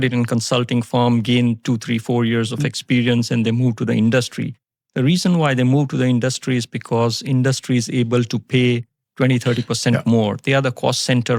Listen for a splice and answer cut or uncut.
uncut